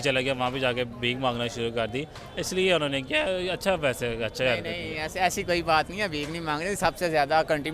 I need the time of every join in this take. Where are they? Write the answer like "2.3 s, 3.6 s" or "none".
none